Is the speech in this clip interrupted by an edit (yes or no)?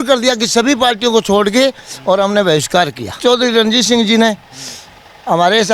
yes